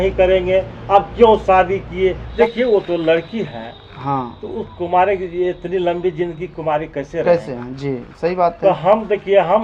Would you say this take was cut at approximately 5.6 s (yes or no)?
no